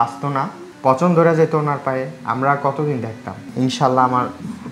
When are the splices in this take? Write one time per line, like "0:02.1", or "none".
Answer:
0:03.4

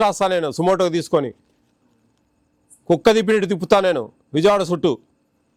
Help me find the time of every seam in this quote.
none

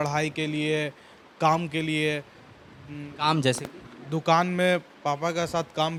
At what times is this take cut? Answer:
none

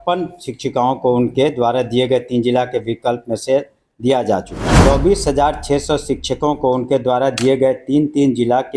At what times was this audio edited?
0:04.6

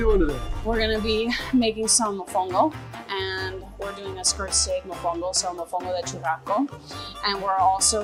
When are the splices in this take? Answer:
none

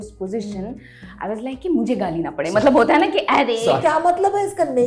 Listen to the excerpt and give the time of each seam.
0:03.8

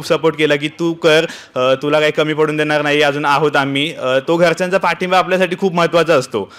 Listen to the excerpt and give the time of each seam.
none

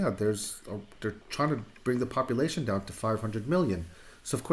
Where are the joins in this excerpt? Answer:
0:01.2

